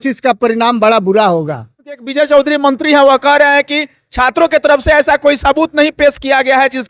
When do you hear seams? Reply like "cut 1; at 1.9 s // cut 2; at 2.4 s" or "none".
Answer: cut 1; at 2.0 s